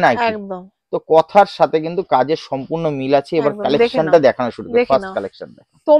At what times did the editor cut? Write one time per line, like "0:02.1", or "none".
none